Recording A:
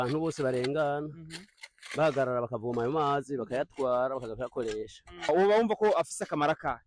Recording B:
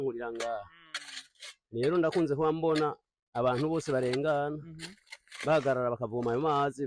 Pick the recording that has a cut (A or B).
A